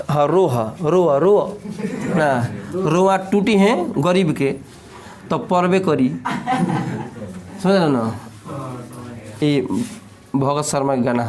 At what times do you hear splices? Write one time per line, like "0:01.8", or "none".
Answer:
none